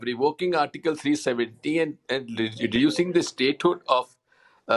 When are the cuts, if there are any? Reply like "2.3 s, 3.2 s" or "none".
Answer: none